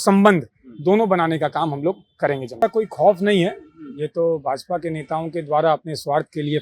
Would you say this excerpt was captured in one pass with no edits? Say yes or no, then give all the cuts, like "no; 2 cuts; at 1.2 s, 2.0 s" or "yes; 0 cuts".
no; 1 cut; at 2.6 s